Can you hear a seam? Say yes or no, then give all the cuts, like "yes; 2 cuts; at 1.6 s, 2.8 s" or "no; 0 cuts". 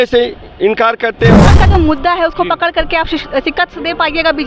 yes; 1 cut; at 1.5 s